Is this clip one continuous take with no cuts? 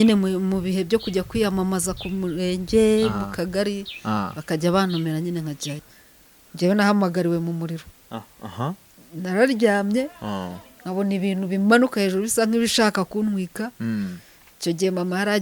no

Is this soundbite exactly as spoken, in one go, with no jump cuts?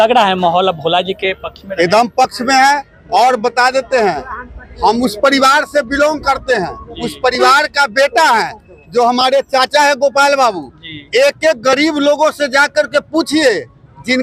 yes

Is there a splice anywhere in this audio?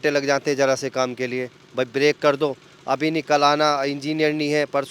no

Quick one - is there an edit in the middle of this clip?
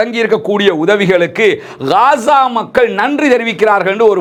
no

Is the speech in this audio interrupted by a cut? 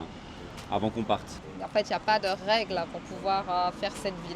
yes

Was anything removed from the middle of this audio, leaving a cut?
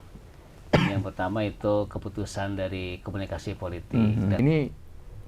yes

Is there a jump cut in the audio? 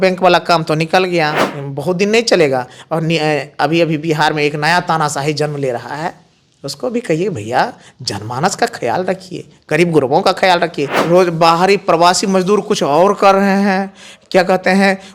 yes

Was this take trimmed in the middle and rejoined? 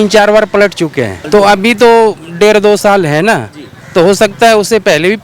yes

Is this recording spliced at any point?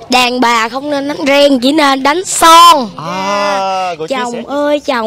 yes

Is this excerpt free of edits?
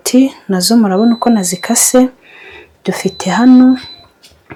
yes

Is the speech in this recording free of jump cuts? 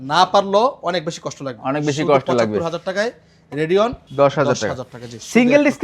no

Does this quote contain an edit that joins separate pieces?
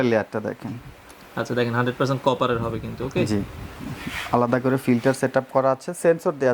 no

